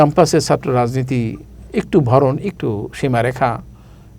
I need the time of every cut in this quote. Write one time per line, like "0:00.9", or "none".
0:02.6